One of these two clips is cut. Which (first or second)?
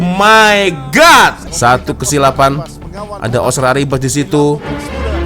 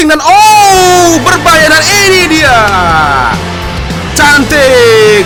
first